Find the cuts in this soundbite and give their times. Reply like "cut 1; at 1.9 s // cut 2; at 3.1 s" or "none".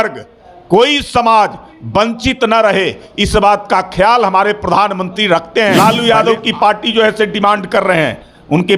cut 1; at 5.7 s